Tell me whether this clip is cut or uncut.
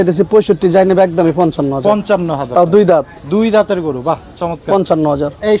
uncut